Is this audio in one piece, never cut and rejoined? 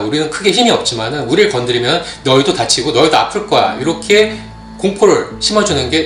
yes; 0 cuts

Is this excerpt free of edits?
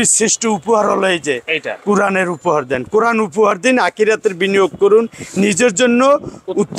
yes; 0 cuts

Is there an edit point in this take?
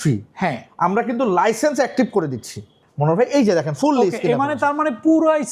no; 0 cuts

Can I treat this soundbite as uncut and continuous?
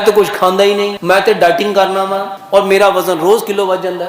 no; 2 cuts; at 1.0 s, 2.3 s

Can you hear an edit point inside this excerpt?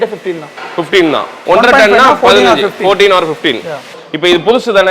yes; 2 cuts; at 1.5 s, 3.9 s

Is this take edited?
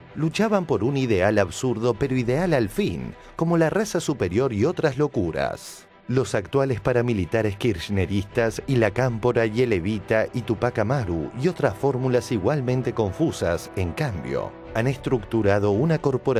yes; 1 cut; at 3.1 s

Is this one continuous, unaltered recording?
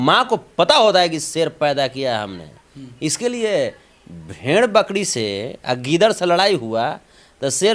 yes; 0 cuts

